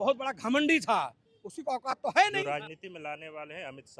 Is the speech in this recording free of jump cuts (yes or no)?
no